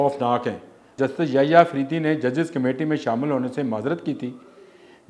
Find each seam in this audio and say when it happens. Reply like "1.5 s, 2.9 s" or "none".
0.9 s

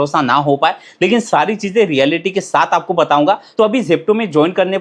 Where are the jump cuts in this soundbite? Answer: 3.5 s

